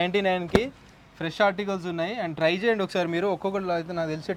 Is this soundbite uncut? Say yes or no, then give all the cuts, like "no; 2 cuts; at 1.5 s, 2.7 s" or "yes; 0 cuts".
yes; 0 cuts